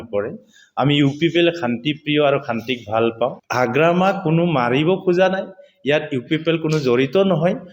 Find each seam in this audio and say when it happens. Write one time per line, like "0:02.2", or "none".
0:03.4

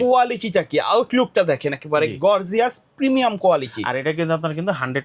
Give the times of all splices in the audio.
none

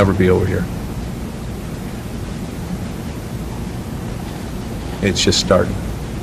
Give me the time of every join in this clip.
none

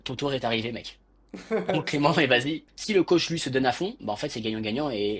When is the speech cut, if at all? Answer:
0:02.6

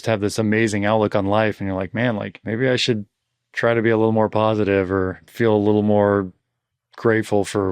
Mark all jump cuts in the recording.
0:02.4
0:05.3

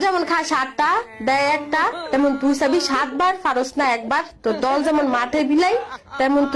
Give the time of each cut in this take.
none

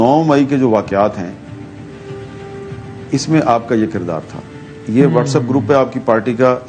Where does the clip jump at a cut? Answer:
none

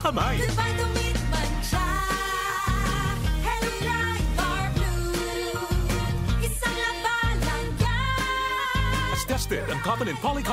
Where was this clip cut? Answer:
none

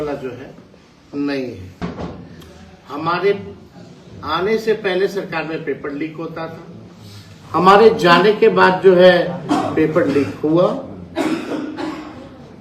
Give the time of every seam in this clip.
0:01.7

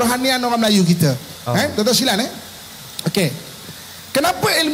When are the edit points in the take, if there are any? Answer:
none

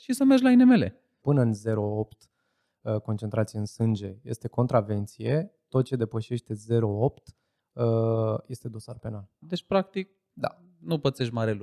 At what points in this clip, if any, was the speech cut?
0:01.1
0:09.4

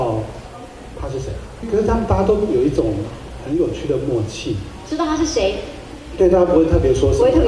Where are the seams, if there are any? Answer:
0:01.7

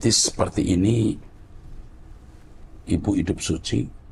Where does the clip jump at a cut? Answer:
none

